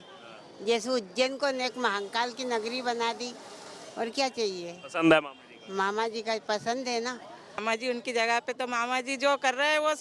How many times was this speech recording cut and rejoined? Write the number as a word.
one